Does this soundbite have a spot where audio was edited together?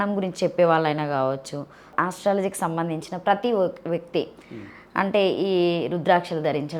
yes; 1 cut; at 1.9 s

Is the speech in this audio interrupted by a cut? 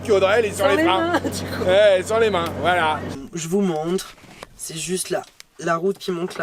yes; 1 cut; at 3.1 s

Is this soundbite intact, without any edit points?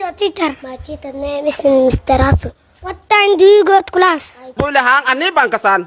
no; 1 cut; at 4.5 s

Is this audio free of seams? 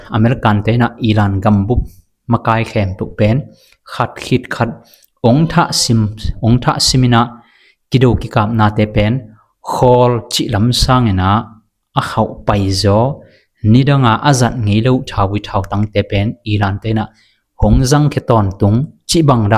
yes; 0 cuts

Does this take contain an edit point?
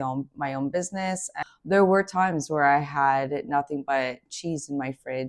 yes; 1 cut; at 1.4 s

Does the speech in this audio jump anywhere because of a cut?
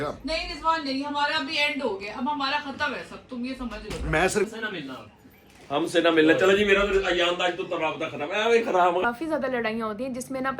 yes; 2 cuts; at 4.5 s, 9.0 s

